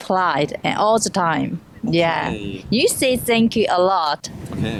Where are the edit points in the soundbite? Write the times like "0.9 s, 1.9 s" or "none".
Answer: none